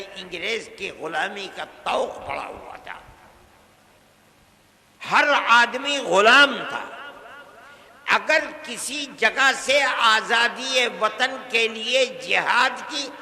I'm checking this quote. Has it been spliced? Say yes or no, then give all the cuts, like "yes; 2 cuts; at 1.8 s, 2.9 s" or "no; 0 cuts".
no; 0 cuts